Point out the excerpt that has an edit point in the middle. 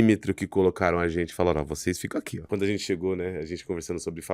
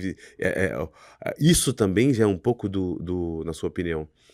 first; 1 cut; at 2.4 s

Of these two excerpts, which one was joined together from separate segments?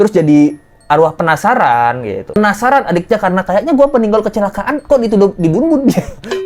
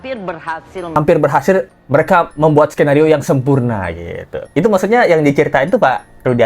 second; 1 cut; at 1.0 s

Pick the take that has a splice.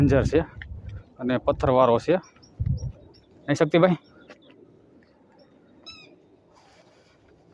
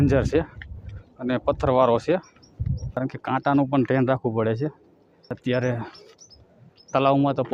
second; 2 cuts; at 3.0 s, 5.3 s

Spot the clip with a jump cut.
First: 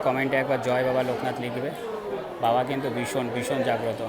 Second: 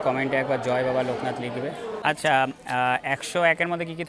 second; 1 cut; at 2.0 s

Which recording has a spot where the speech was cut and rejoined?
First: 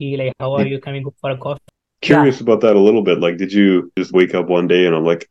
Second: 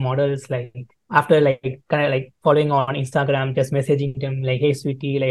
first; 2 cuts; at 1.6 s, 4.0 s

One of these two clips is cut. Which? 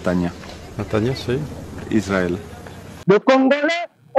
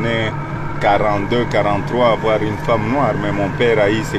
first; 1 cut; at 3.0 s

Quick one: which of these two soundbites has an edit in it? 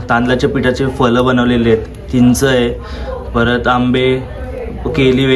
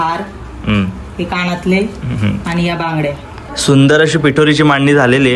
second; 1 cut; at 3.4 s

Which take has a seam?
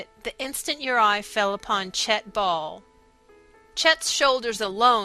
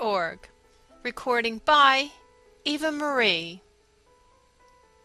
first; 1 cut; at 3.6 s

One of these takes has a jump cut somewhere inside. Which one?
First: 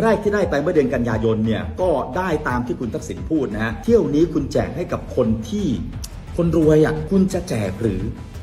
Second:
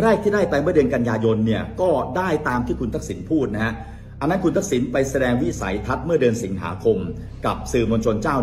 first; 2 cuts; at 3.8 s, 7.0 s

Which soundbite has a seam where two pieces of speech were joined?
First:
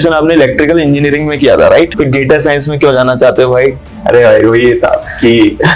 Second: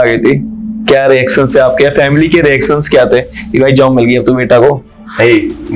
first; 1 cut; at 1.9 s

